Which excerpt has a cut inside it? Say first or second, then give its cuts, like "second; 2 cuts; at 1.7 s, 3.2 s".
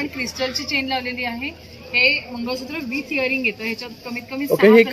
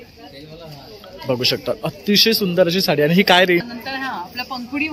second; 1 cut; at 3.6 s